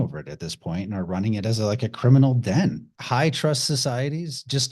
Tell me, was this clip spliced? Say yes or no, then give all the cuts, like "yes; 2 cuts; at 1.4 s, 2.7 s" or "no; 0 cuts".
yes; 1 cut; at 2.9 s